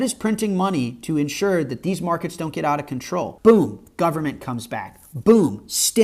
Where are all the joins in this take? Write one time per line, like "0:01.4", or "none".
0:03.3